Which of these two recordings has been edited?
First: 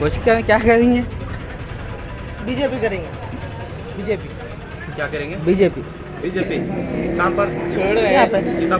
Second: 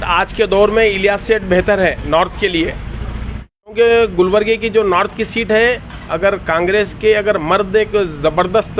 second; 1 cut; at 3.8 s

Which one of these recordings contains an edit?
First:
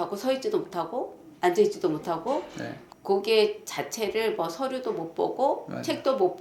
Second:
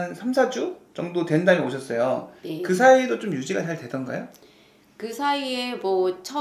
first; 1 cut; at 2.9 s

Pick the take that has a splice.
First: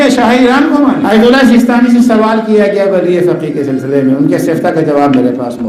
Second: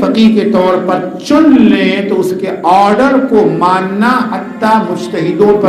first; 1 cut; at 1.0 s

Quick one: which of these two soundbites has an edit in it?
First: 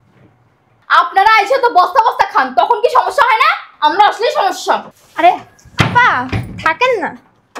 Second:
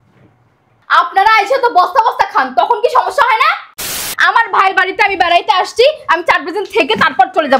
second; 1 cut; at 3.8 s

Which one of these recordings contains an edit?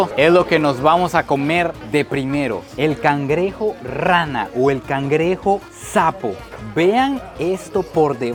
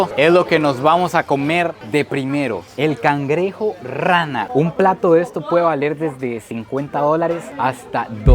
second; 1 cut; at 4.5 s

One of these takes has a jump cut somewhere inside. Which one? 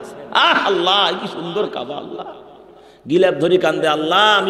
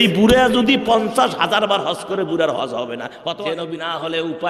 second; 1 cut; at 3.2 s

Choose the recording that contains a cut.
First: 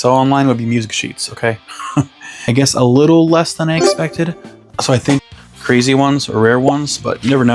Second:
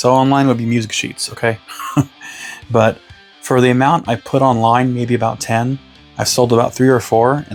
first; 2 cuts; at 2.2 s, 5.2 s

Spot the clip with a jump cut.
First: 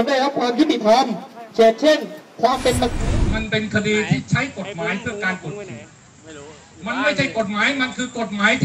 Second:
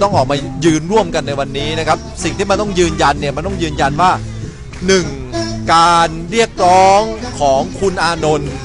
first; 1 cut; at 2.9 s

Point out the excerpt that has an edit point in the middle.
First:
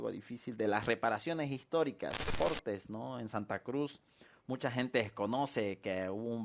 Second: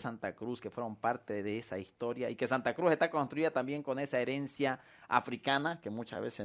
first; 1 cut; at 2.3 s

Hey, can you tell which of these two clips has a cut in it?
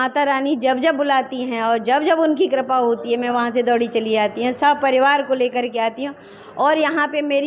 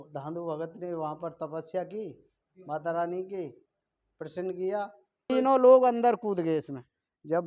second; 1 cut; at 5.3 s

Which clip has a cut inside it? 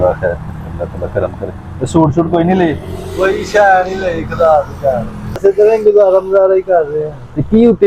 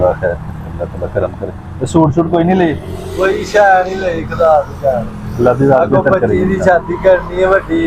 first; 1 cut; at 5.4 s

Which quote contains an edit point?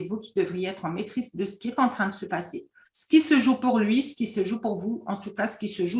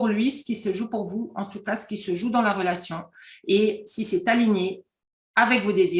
first; 1 cut; at 2.8 s

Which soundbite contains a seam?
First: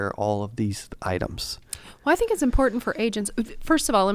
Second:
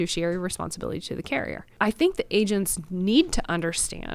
second; 1 cut; at 1.6 s

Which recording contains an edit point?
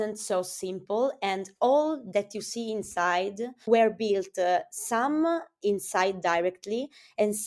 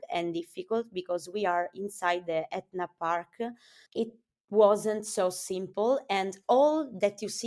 second; 1 cut; at 3.9 s

